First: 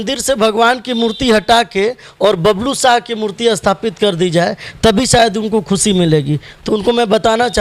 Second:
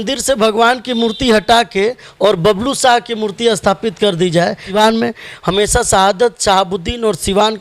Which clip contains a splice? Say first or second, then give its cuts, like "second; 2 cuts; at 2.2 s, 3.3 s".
second; 1 cut; at 4.7 s